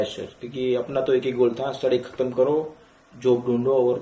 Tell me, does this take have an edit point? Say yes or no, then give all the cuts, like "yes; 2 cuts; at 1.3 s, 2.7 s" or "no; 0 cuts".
no; 0 cuts